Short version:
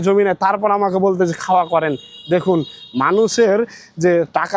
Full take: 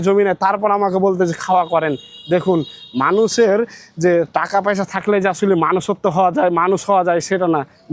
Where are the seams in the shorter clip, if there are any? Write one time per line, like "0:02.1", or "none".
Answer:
none